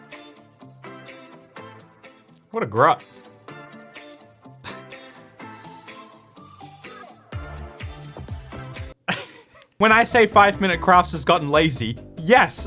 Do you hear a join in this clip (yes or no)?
yes